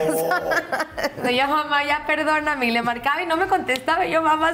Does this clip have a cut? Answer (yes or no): yes